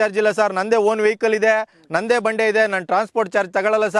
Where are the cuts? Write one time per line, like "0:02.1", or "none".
none